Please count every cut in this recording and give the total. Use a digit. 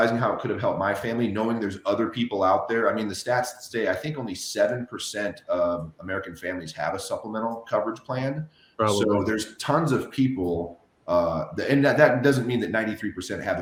0